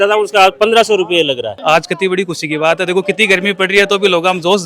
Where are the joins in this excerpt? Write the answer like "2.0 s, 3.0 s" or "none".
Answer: 1.5 s